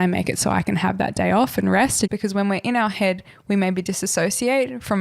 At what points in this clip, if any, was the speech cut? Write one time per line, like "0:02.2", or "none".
0:02.1